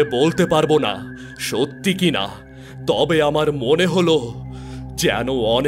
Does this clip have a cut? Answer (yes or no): no